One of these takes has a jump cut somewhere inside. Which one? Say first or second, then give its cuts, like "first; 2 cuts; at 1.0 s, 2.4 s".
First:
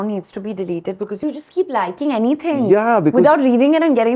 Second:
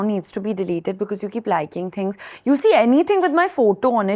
first; 1 cut; at 1.2 s